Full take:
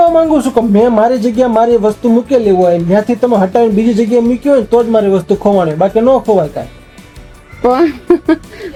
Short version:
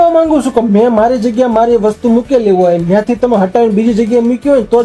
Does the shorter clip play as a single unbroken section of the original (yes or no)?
yes